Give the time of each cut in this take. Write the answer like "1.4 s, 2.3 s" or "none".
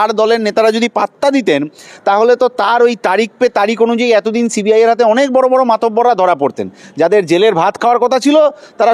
none